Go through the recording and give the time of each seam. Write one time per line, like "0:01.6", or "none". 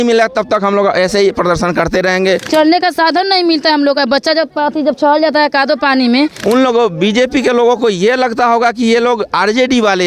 0:02.4
0:06.4